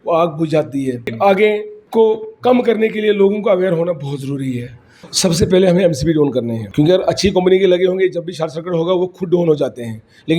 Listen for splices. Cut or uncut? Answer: cut